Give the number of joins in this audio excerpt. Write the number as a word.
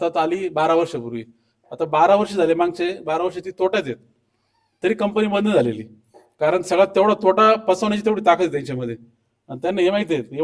zero